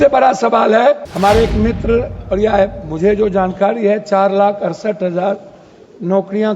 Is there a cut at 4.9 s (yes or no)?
no